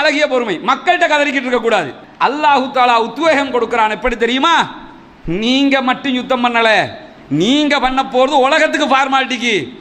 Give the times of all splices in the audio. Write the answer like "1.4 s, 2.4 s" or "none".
2.0 s